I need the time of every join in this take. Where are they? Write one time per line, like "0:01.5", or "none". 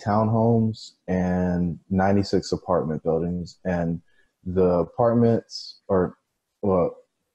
none